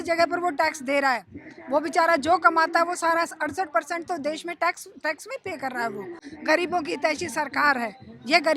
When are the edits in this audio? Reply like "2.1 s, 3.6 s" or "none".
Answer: 6.3 s